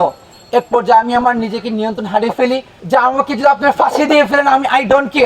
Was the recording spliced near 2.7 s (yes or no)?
yes